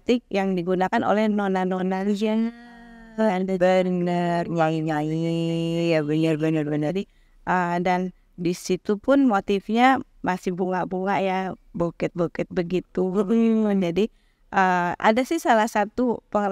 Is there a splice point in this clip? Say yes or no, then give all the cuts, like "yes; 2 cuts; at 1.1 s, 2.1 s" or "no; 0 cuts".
no; 0 cuts